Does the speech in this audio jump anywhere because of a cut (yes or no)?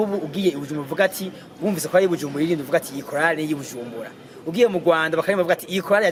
no